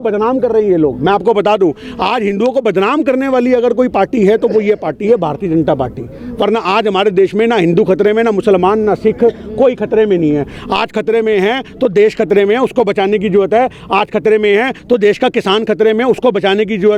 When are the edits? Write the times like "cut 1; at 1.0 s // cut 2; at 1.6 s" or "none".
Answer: none